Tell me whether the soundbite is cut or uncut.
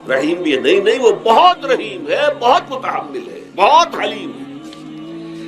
uncut